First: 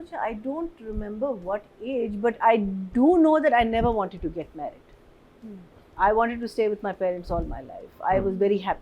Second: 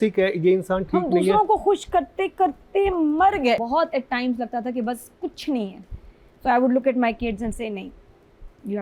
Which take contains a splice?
second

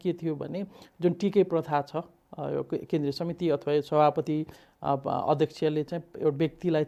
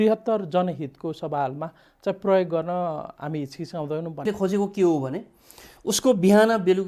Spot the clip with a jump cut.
second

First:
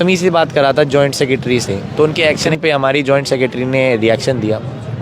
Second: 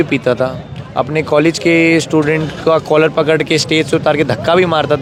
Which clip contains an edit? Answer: first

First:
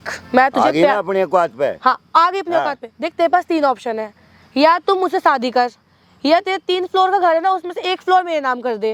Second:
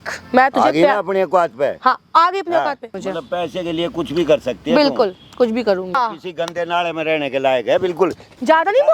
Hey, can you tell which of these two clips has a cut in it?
second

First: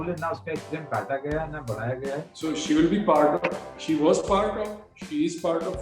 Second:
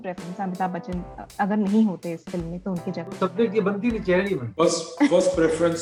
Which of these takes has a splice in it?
first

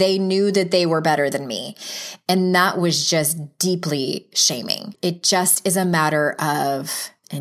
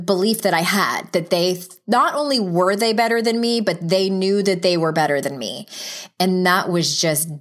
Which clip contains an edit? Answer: first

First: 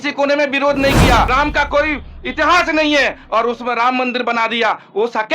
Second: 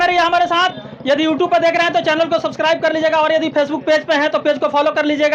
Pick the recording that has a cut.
first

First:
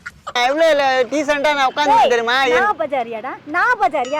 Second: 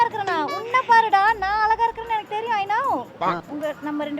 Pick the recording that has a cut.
second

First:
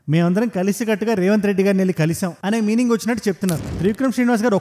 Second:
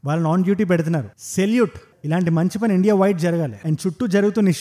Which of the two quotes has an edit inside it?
first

